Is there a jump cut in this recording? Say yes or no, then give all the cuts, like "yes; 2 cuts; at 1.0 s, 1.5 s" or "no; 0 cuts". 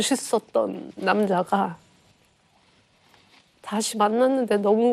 no; 0 cuts